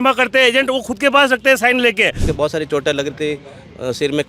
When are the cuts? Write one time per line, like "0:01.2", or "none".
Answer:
0:02.2

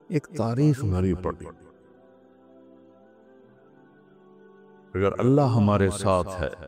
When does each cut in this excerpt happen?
0:01.6
0:03.0
0:04.8

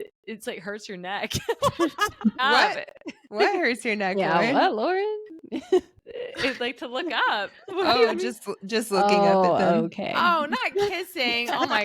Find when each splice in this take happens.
0:02.4

